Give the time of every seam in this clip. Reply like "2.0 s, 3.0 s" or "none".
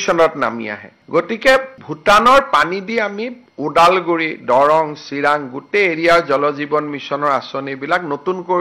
none